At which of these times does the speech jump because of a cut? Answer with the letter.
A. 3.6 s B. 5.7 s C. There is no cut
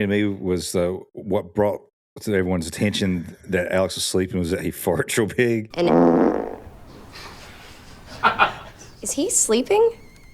B